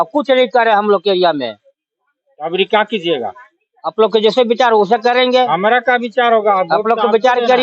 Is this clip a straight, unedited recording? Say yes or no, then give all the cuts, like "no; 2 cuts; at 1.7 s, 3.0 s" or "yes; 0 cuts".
yes; 0 cuts